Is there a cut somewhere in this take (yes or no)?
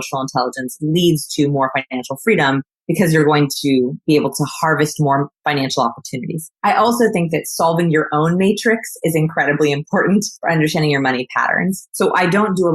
yes